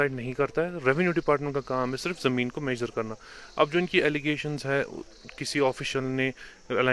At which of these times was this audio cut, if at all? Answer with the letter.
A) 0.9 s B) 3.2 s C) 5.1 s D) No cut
D